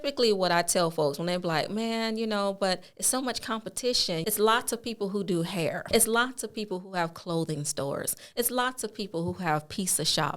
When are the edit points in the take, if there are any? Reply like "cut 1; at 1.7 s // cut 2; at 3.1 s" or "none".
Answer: cut 1; at 4.2 s // cut 2; at 5.9 s